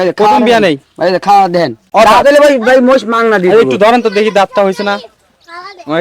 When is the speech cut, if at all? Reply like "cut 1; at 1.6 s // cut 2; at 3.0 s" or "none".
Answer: cut 1; at 1.8 s